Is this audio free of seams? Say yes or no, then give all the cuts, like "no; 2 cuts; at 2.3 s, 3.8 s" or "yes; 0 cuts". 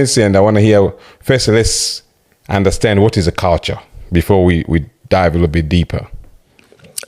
yes; 0 cuts